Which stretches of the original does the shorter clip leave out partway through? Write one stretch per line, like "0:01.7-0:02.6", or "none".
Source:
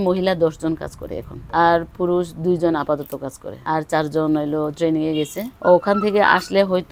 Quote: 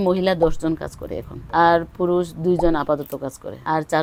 none